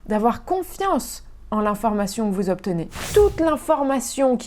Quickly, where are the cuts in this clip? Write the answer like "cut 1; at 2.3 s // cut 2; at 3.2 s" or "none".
cut 1; at 3.0 s

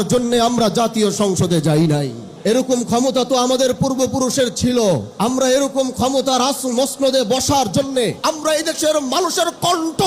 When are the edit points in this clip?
cut 1; at 2.2 s // cut 2; at 5.1 s // cut 3; at 8.2 s

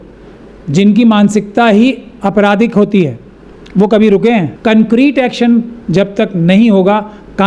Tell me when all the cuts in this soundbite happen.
cut 1; at 4.5 s

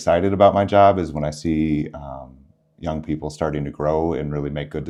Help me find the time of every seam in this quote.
none

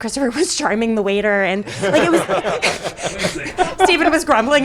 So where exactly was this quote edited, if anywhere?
cut 1; at 3.5 s

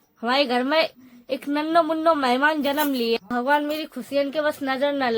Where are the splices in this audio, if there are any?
cut 1; at 3.3 s

